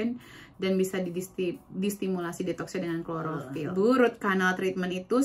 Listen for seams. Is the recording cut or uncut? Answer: cut